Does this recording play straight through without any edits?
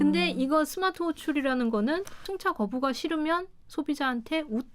no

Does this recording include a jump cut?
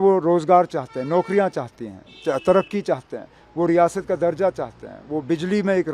no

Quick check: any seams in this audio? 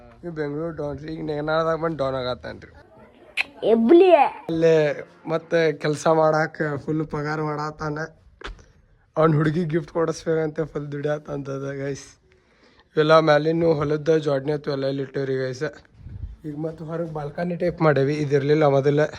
yes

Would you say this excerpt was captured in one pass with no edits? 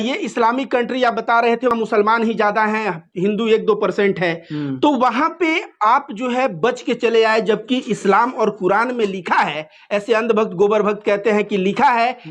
no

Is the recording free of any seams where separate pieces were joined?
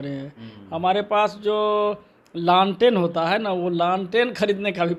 yes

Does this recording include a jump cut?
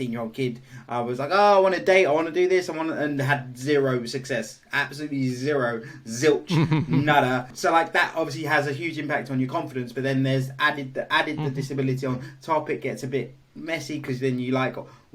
no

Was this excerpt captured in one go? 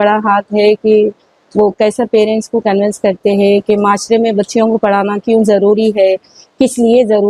yes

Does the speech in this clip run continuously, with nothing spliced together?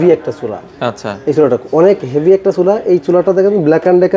yes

